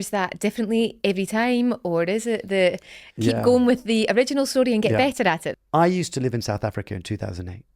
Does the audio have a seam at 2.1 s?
no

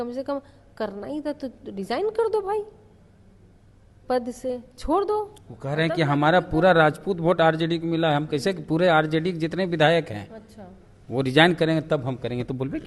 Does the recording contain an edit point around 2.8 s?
no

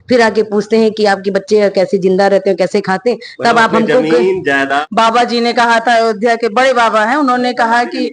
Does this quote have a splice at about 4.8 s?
yes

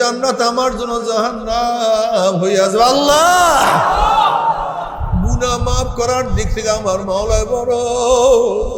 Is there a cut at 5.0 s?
yes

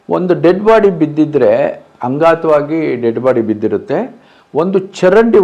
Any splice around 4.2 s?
no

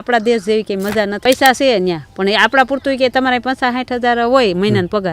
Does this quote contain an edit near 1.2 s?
yes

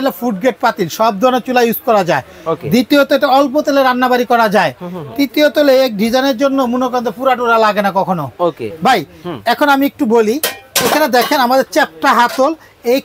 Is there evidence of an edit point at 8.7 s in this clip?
yes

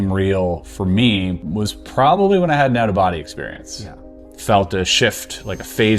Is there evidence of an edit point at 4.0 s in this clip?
yes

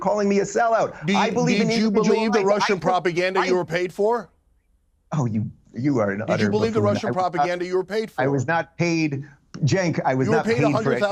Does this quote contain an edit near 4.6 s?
no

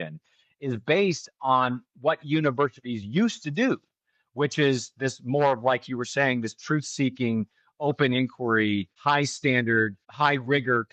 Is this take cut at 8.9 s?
yes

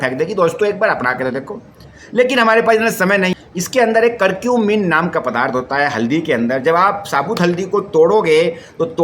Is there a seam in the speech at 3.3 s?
yes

